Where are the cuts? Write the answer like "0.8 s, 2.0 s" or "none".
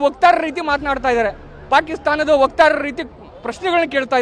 none